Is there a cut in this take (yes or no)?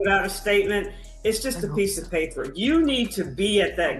yes